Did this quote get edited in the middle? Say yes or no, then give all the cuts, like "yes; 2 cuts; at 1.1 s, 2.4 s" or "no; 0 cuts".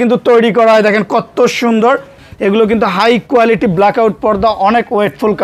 yes; 1 cut; at 2.3 s